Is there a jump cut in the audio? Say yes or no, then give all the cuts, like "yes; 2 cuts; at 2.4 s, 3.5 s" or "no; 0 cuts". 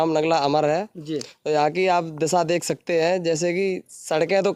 no; 0 cuts